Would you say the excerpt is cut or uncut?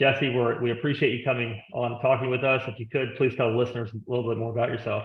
uncut